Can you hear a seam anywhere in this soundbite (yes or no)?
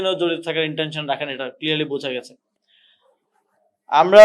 no